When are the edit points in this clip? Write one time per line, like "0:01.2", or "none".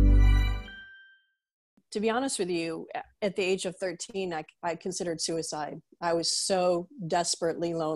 0:01.7